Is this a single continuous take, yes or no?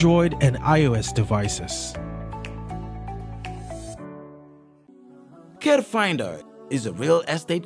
no